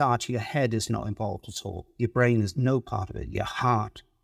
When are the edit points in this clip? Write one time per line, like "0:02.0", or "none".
none